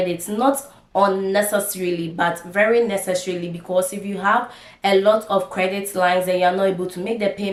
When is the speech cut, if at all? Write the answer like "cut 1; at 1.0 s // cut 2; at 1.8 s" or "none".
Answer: none